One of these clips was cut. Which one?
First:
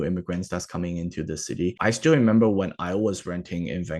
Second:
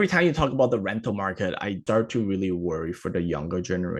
second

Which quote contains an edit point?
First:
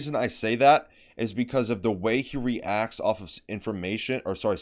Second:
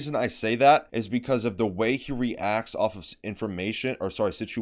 second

